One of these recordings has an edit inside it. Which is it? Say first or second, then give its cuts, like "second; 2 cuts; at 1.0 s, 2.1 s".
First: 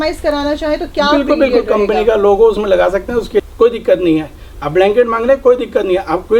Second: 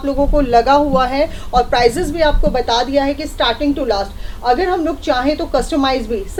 first; 1 cut; at 3.4 s